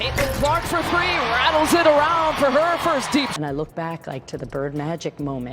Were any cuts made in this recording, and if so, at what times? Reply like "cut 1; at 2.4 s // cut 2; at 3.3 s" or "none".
cut 1; at 3.3 s